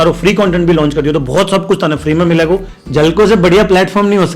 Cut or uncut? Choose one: cut